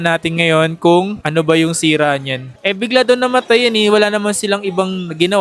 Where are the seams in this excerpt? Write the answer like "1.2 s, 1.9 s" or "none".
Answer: 2.5 s